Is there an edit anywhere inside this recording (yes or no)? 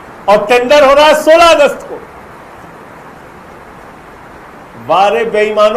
no